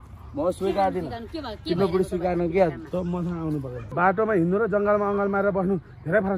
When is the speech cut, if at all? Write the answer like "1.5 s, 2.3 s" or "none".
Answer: 3.9 s